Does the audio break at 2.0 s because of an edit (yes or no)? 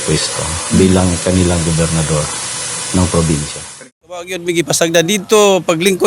no